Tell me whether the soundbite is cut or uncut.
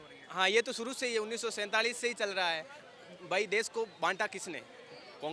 uncut